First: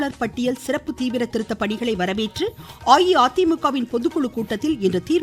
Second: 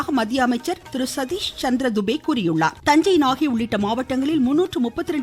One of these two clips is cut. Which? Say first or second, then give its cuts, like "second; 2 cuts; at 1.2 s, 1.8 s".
second; 2 cuts; at 0.8 s, 2.8 s